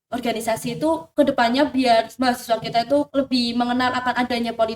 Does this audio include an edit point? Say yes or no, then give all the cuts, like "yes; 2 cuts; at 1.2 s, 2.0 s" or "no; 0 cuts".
yes; 3 cuts; at 1.1 s, 2.1 s, 3.1 s